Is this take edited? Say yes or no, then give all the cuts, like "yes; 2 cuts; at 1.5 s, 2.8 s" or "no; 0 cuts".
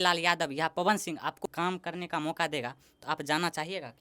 yes; 1 cut; at 1.4 s